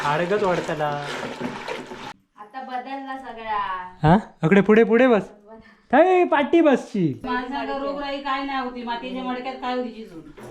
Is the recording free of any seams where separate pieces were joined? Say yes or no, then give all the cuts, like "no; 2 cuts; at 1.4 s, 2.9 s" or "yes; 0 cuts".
no; 2 cuts; at 2.1 s, 7.2 s